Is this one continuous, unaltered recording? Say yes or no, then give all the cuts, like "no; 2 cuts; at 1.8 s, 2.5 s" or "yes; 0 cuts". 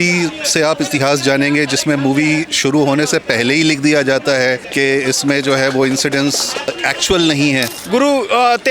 no; 3 cuts; at 4.6 s, 6.7 s, 7.8 s